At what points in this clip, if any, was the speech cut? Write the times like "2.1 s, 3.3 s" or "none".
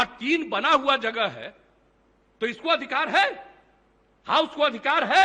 none